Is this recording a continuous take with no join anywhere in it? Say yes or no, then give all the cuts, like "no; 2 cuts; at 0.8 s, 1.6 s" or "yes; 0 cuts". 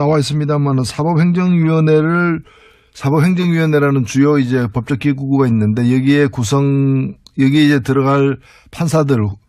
no; 1 cut; at 6.7 s